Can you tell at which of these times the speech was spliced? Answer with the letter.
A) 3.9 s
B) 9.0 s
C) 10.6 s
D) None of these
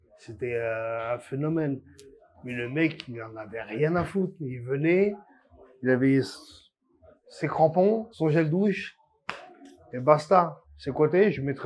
C